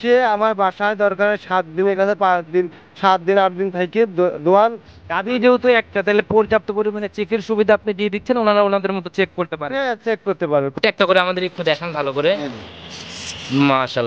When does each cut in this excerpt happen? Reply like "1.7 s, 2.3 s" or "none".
10.7 s